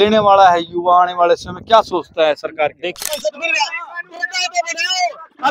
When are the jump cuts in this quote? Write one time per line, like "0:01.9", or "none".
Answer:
0:02.8